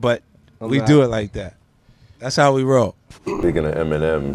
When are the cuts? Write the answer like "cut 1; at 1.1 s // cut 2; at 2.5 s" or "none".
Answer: cut 1; at 3.4 s